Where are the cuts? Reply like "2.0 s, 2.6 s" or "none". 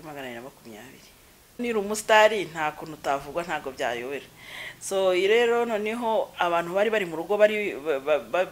1.6 s